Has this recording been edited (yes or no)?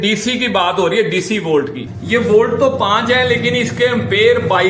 yes